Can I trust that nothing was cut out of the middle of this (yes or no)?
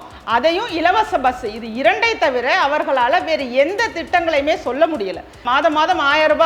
no